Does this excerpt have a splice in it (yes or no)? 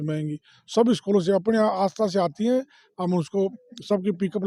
no